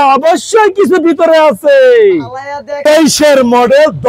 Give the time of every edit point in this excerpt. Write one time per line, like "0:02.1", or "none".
0:02.8